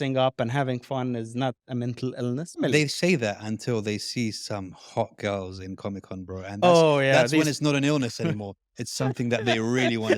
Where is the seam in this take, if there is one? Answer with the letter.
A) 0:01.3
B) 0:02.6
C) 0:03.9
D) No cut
B